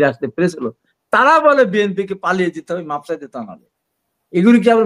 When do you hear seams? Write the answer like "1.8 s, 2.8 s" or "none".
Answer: none